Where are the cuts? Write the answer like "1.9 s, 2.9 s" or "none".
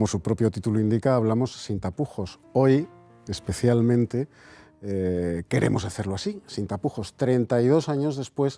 5.4 s